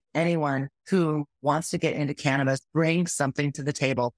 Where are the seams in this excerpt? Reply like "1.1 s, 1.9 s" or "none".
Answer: 1.1 s, 2.6 s